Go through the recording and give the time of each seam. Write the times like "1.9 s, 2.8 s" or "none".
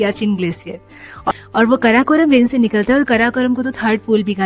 1.3 s